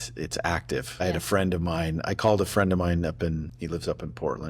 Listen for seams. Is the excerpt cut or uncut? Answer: cut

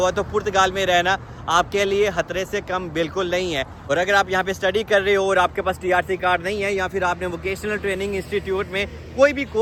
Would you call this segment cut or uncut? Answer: uncut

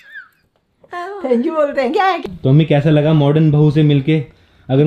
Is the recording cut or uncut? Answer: cut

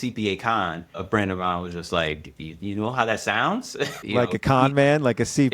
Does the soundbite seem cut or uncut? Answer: uncut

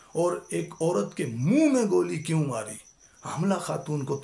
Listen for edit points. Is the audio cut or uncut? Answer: uncut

